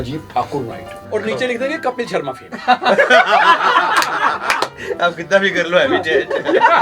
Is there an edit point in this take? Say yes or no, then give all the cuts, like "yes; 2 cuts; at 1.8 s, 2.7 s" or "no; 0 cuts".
yes; 2 cuts; at 0.9 s, 4.7 s